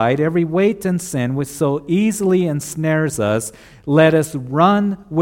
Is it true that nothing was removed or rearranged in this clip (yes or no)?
yes